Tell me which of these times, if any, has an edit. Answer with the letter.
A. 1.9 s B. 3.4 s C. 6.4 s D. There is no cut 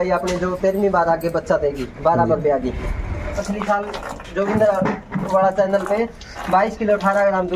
B